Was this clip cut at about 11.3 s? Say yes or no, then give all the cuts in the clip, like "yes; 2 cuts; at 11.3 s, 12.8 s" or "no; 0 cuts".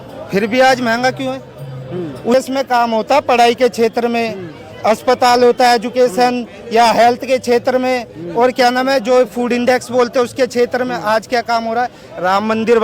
no; 1 cut; at 2.3 s